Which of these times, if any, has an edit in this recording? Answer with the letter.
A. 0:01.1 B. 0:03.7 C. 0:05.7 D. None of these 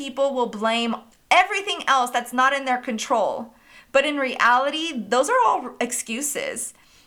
A